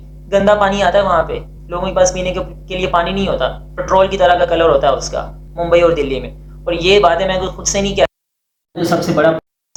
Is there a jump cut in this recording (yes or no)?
no